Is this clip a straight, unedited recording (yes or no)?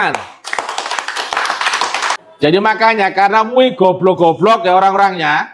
no